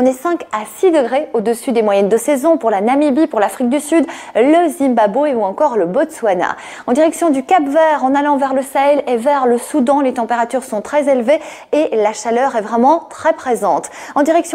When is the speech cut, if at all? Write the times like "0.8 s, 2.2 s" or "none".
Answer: none